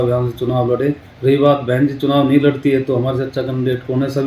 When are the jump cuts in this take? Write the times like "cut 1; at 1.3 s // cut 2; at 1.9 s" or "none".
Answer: cut 1; at 1.1 s